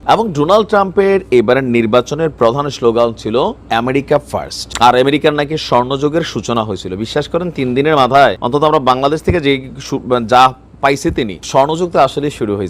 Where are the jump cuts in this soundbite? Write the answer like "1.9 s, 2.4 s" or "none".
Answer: 3.6 s, 4.6 s, 8.4 s, 11.4 s